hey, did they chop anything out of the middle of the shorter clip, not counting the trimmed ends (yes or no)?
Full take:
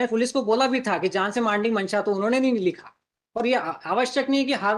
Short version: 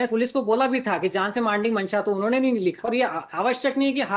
yes